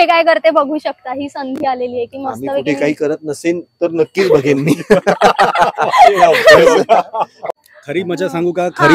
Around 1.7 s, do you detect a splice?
no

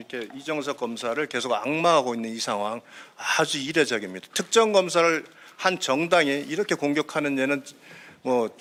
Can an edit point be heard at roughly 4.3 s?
no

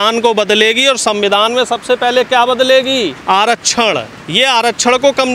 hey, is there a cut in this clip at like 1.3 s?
no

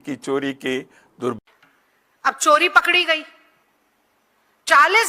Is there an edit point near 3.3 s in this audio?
no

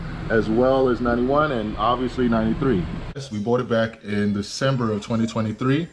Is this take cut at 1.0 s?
no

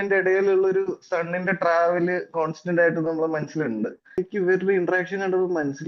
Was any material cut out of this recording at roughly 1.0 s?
no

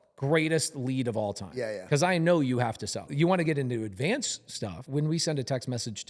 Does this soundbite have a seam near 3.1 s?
yes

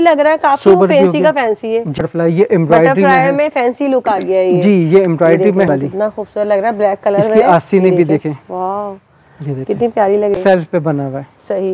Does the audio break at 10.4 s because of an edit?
yes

